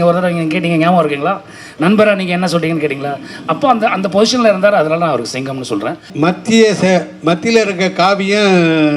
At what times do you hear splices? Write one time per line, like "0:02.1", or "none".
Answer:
0:06.1